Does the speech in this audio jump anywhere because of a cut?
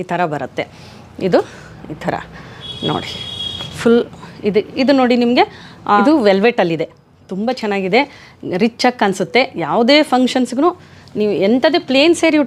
no; 0 cuts

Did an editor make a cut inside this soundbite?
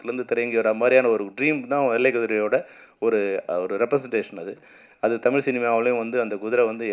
no; 0 cuts

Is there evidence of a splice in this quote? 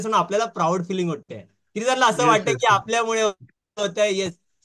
no; 0 cuts

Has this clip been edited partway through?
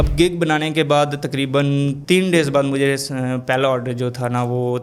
no; 0 cuts

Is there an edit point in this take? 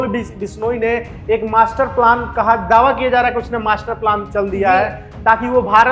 no; 0 cuts

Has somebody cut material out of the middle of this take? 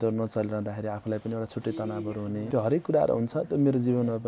yes; 1 cut; at 2.5 s

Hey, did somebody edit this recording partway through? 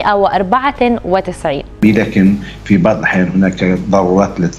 yes; 1 cut; at 1.8 s

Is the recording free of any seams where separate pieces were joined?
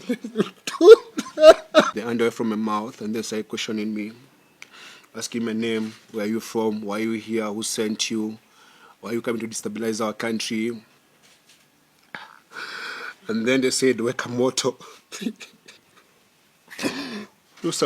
no; 1 cut; at 1.9 s

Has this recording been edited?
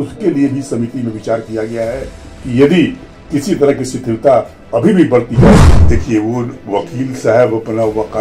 yes; 1 cut; at 5.7 s

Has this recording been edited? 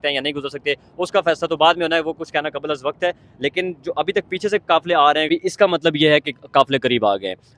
yes; 1 cut; at 5.3 s

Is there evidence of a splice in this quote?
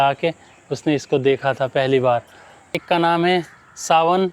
yes; 1 cut; at 2.8 s

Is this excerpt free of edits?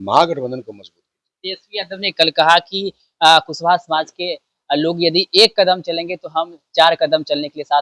yes; 0 cuts

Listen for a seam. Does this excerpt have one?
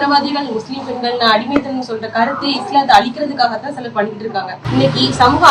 no; 0 cuts

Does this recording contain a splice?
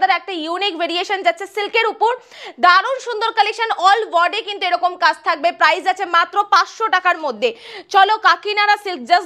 no; 0 cuts

